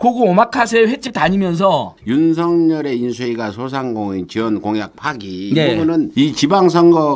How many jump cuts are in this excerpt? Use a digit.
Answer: 2